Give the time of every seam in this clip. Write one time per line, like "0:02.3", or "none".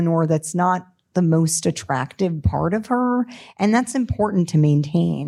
none

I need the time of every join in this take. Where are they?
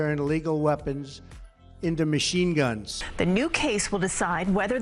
0:03.0

